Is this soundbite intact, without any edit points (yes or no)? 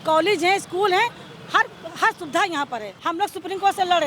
no